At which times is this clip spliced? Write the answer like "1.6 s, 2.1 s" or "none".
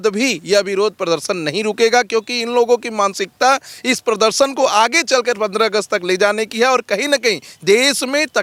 none

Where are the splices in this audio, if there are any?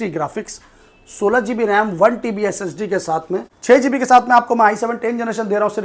3.5 s

